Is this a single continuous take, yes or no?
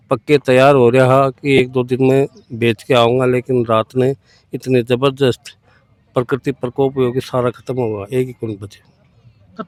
yes